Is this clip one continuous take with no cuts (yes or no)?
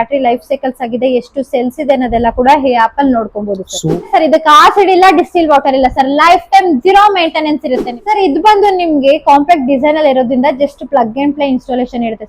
no